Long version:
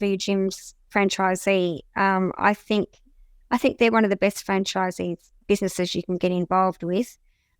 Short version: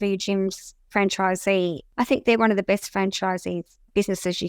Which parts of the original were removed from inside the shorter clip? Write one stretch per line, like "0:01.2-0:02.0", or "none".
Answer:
0:01.8-0:03.4